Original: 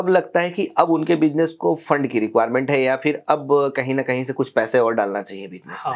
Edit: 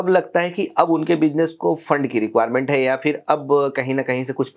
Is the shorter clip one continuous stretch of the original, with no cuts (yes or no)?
yes